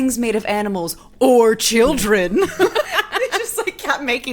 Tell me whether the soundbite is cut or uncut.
cut